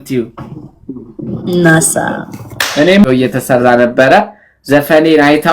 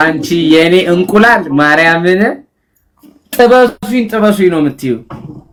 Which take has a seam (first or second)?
first